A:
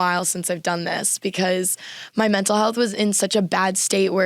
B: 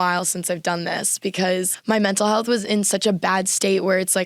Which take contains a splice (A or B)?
B